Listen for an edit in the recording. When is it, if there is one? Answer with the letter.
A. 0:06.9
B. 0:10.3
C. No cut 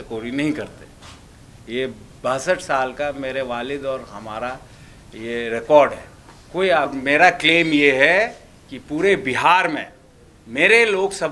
A